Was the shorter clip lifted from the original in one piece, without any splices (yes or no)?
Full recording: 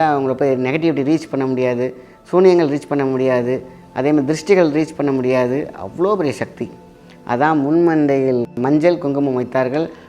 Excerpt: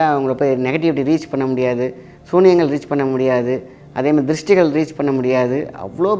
yes